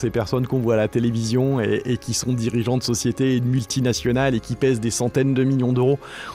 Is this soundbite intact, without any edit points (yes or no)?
yes